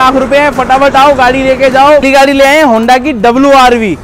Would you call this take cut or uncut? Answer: cut